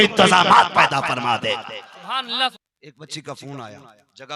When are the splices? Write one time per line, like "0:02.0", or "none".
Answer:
0:02.5